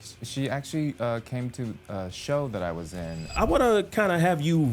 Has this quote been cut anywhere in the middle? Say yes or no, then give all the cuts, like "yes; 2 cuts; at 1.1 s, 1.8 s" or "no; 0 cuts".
yes; 1 cut; at 3.4 s